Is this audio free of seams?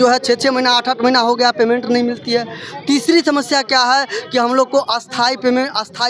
yes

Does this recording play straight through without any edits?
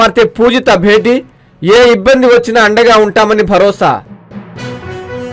no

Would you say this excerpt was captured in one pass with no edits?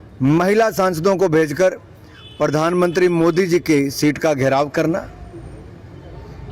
yes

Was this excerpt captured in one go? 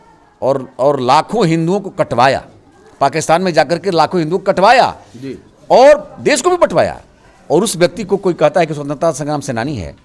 yes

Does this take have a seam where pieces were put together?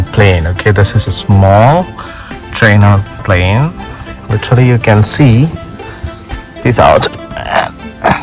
yes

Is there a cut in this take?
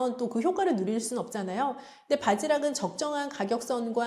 no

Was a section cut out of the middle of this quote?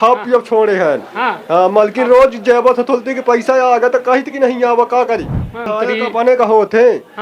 yes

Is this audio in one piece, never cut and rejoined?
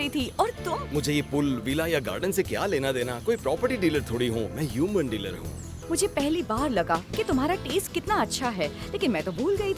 yes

